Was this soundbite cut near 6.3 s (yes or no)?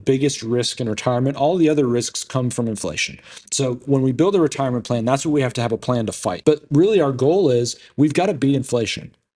yes